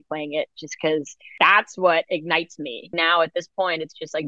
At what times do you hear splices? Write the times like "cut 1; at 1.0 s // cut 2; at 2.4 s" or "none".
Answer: cut 1; at 1.2 s // cut 2; at 2.9 s